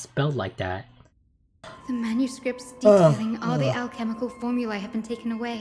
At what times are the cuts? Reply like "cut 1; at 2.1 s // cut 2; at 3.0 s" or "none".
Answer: cut 1; at 1.7 s